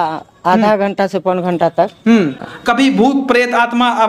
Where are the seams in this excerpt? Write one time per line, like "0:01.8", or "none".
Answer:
0:02.5